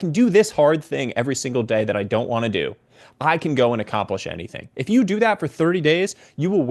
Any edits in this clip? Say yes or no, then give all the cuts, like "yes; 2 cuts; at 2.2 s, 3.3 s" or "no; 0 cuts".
no; 0 cuts